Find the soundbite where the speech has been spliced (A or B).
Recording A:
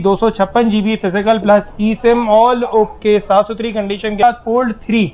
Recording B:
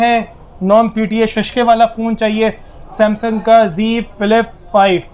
A